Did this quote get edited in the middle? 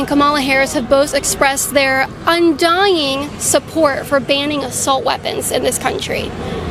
no; 0 cuts

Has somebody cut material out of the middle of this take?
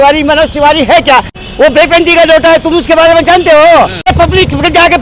yes; 2 cuts; at 1.4 s, 4.1 s

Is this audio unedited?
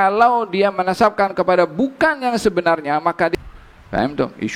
no; 1 cut; at 3.3 s

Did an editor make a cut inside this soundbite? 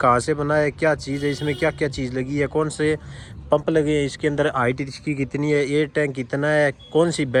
no; 0 cuts

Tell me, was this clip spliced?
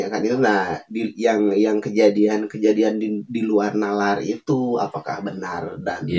no; 0 cuts

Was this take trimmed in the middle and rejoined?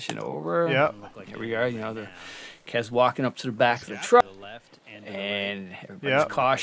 yes; 1 cut; at 4.2 s

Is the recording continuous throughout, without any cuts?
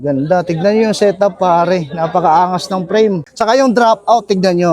no; 1 cut; at 3.3 s

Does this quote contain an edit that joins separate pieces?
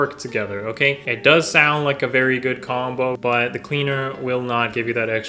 yes; 2 cuts; at 1.1 s, 3.2 s

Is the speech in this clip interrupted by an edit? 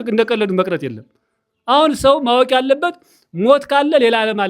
no; 0 cuts

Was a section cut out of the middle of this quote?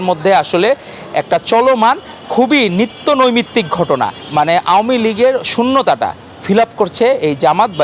yes; 1 cut; at 4.2 s

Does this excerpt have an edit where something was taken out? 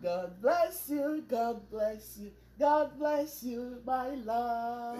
no; 0 cuts

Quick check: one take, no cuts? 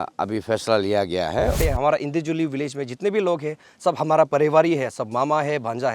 no; 1 cut; at 1.6 s

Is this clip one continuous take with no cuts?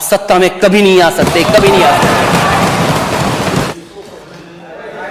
no; 1 cut; at 3.7 s

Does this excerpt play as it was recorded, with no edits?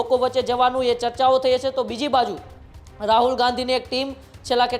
yes; 0 cuts

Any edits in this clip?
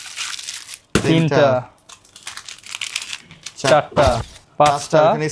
yes; 1 cut; at 4.4 s

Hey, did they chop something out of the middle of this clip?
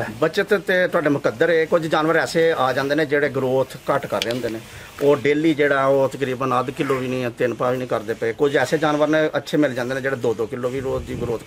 no; 0 cuts

